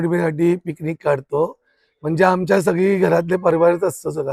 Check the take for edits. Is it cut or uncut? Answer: uncut